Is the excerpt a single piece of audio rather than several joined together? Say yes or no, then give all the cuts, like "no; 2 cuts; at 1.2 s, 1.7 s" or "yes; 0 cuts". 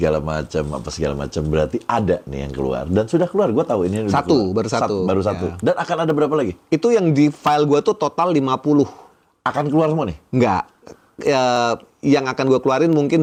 yes; 0 cuts